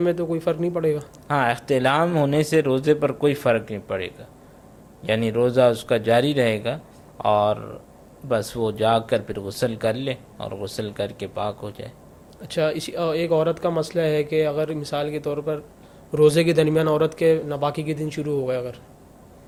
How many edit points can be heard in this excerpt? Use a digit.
0